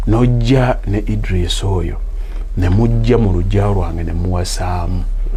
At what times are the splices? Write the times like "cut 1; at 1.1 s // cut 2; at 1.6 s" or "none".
none